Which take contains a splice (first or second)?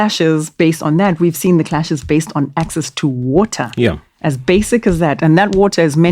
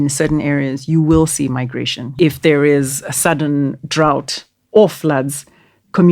second